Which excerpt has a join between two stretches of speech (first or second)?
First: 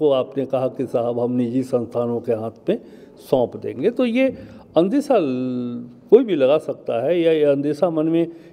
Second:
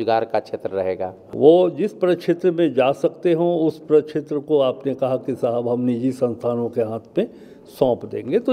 second